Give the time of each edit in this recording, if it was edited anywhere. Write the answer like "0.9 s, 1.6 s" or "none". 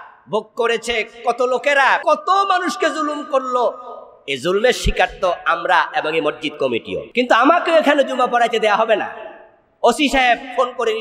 2.0 s, 7.1 s